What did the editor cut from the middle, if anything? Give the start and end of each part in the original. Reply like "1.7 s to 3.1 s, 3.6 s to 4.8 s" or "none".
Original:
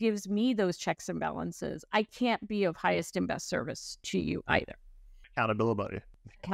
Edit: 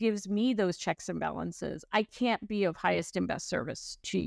none